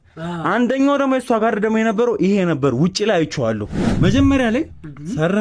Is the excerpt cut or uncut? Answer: cut